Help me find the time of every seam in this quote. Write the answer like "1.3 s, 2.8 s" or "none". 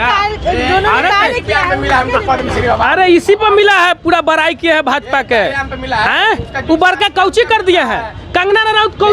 none